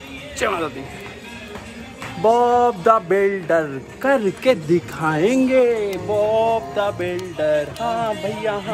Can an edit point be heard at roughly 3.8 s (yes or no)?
no